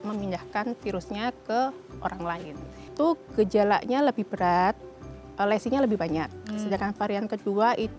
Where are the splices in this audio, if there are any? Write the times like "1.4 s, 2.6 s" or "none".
2.9 s